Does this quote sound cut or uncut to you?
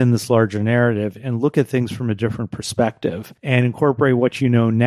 cut